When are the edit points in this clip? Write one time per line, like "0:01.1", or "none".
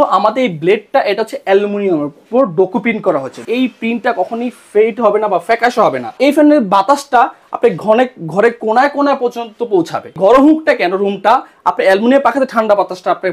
0:03.4
0:06.1
0:10.1